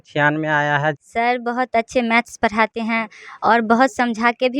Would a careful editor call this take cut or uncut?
cut